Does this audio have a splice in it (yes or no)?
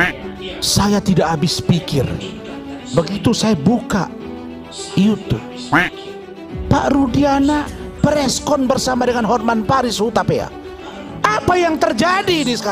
no